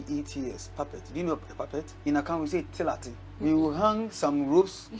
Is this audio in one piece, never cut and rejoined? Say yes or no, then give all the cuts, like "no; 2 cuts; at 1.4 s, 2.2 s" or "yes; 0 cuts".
no; 2 cuts; at 1.9 s, 3.3 s